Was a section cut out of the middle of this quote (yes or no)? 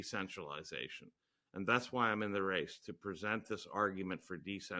no